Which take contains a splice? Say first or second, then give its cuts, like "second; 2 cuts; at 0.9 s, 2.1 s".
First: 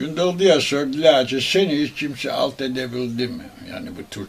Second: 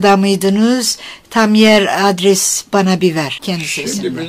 second; 1 cut; at 3.4 s